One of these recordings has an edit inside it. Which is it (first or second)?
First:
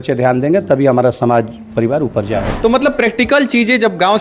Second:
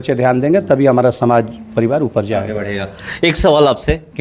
first